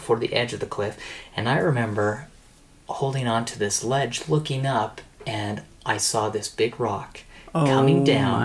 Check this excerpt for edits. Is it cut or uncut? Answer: uncut